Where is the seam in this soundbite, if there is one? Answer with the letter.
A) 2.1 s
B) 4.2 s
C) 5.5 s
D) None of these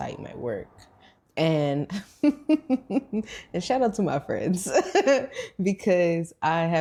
D